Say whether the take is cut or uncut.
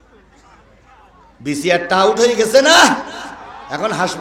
uncut